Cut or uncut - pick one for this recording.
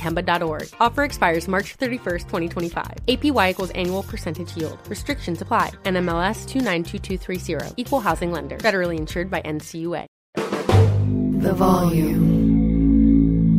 cut